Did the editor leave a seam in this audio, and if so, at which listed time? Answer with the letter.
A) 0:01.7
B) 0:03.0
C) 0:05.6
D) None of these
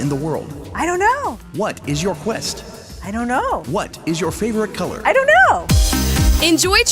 C